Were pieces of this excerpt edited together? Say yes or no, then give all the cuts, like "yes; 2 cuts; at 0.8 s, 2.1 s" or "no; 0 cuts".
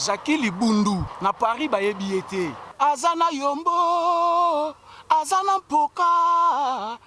yes; 2 cuts; at 1.1 s, 2.6 s